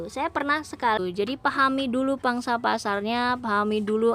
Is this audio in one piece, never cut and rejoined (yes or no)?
no